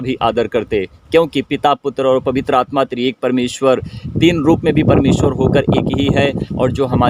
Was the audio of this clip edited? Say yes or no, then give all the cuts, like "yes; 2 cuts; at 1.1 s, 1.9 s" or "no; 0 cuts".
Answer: no; 0 cuts